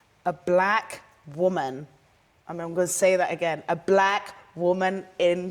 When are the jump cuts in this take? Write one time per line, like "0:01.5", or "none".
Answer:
none